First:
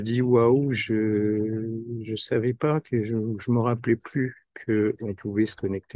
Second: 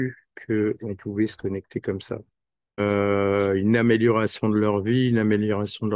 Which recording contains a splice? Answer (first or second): second